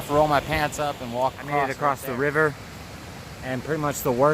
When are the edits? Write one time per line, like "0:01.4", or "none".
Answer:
0:01.7